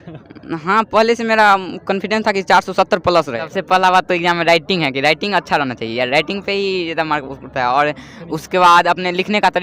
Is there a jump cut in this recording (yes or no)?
yes